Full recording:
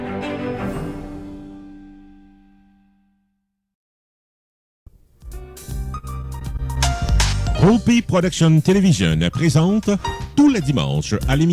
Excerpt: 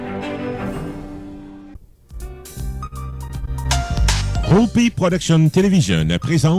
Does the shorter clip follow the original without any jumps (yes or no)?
no